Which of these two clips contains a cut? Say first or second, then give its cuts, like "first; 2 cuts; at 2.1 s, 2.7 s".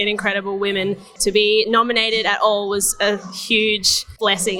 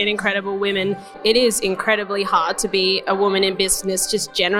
second; 1 cut; at 1.2 s